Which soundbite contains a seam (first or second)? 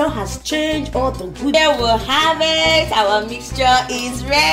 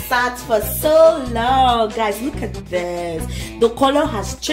first